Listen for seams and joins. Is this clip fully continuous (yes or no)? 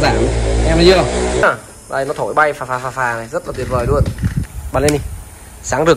no